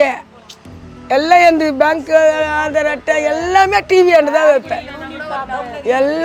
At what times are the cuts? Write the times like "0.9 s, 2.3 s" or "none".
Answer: none